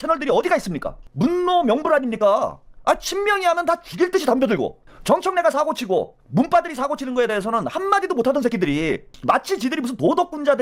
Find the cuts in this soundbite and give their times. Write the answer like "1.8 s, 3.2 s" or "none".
1.0 s, 4.8 s